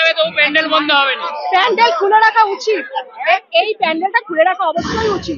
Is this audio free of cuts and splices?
yes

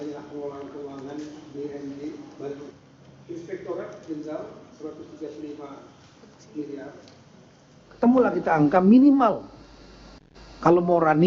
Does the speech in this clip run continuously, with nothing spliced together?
no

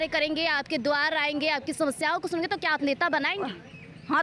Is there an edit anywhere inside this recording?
no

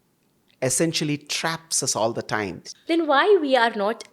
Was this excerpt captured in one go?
no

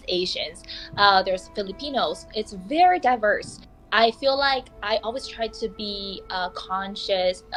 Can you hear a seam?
no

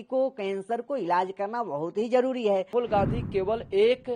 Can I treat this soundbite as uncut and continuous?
no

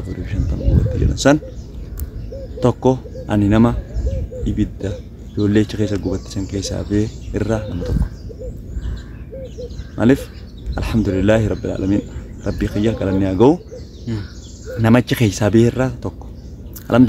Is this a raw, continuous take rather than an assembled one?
yes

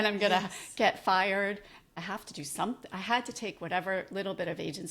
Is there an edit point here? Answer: yes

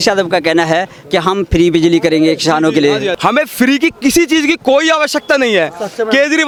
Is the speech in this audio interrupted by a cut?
no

